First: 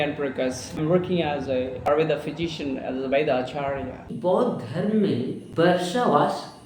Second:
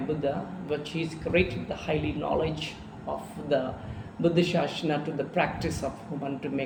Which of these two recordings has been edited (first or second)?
first